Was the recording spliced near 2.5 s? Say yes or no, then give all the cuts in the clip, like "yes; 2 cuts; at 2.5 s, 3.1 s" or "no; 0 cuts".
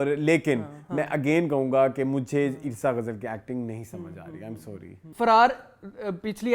no; 1 cut; at 5.0 s